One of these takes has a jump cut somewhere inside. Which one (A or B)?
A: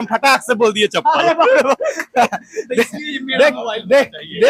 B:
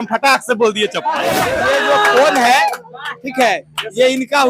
B